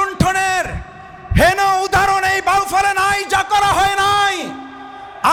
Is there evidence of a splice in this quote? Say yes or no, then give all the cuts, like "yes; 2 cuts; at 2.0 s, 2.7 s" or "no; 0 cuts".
no; 0 cuts